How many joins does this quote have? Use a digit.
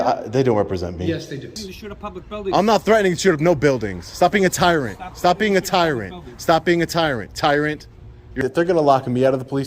2